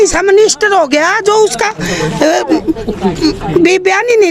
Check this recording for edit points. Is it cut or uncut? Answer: uncut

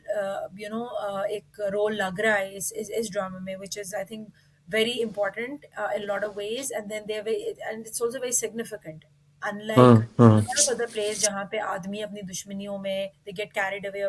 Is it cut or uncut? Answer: uncut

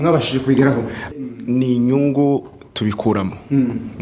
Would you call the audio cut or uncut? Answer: cut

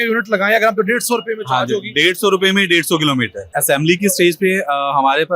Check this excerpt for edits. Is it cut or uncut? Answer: cut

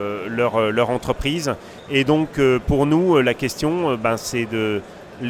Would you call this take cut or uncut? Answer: uncut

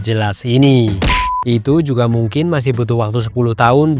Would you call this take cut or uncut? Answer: cut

